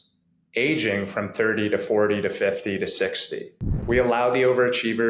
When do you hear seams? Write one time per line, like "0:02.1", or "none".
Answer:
0:03.8